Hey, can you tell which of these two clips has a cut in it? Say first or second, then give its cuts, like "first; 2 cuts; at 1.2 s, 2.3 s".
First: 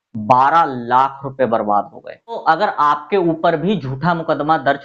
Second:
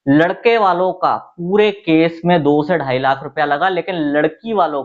first; 1 cut; at 2.4 s